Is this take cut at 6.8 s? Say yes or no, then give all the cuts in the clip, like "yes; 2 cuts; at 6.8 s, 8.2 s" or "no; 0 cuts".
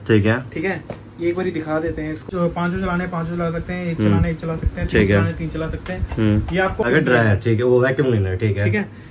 yes; 2 cuts; at 2.2 s, 6.8 s